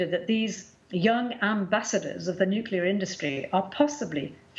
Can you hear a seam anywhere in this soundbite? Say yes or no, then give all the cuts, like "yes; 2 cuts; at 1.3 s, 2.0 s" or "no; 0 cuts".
no; 0 cuts